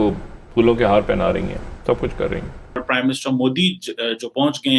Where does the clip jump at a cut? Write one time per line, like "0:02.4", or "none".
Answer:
0:02.8

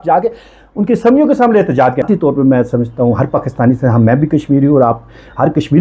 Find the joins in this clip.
0:02.1

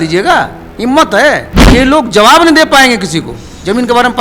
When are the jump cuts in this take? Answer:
0:01.5

